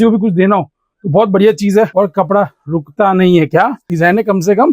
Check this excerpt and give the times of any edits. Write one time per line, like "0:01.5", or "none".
0:01.9
0:03.8